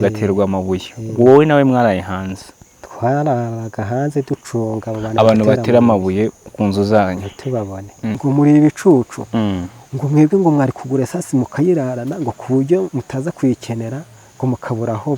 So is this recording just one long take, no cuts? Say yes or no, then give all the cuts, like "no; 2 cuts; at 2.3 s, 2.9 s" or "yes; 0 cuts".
no; 1 cut; at 8.1 s